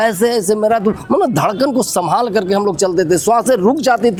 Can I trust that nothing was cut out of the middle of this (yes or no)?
yes